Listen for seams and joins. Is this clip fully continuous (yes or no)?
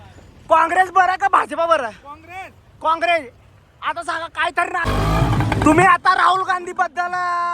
no